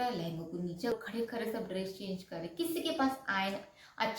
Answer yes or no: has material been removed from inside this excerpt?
yes